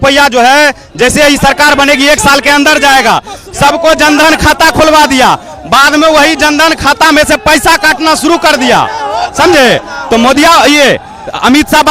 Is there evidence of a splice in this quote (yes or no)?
no